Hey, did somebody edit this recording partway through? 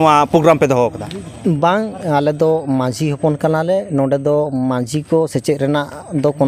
no; 0 cuts

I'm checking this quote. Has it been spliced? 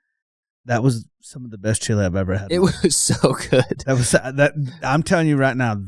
no; 0 cuts

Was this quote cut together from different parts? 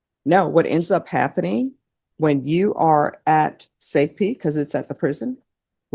yes; 1 cut; at 2.7 s

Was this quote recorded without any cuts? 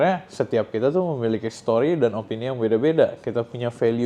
yes; 0 cuts

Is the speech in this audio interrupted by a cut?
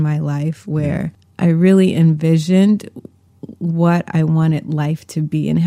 yes; 1 cut; at 1.2 s

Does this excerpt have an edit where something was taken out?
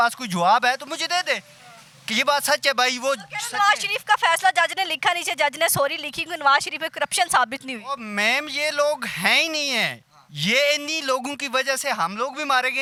no; 0 cuts

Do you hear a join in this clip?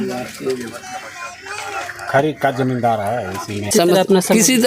yes; 1 cut; at 3.7 s

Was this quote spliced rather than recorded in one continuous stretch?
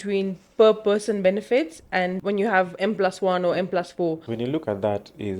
yes; 2 cuts; at 2.2 s, 4.3 s

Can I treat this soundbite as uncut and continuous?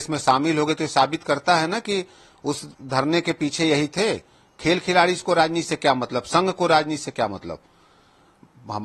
yes; 0 cuts

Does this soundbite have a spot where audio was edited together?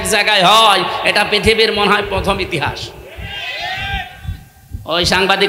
no; 0 cuts

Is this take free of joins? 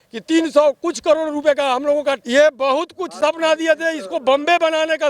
no; 1 cut; at 2.2 s

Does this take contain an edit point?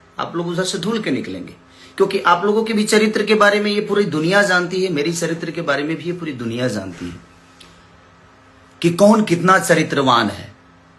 no; 0 cuts

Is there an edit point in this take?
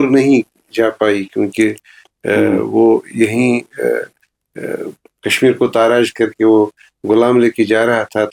no; 0 cuts

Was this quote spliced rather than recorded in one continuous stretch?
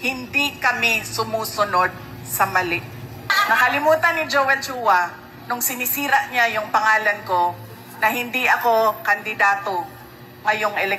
yes; 1 cut; at 3.4 s

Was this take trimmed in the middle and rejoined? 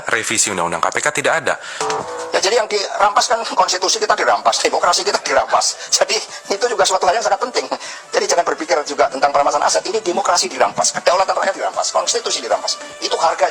yes; 1 cut; at 1.7 s

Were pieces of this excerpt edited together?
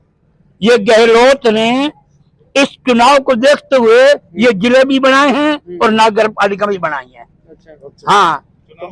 no; 0 cuts

